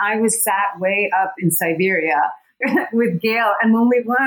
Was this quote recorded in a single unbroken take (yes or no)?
no